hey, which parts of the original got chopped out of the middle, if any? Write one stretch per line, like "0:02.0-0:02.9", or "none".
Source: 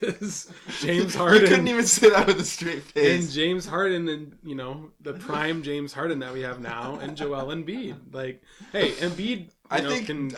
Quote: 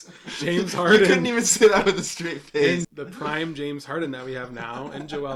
0:03.3-0:05.0